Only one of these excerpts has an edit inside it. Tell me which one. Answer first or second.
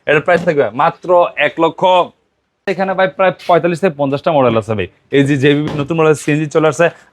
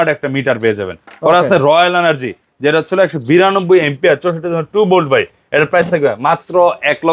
first